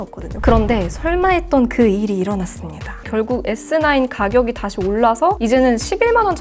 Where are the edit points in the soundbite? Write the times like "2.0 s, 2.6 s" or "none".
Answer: 3.0 s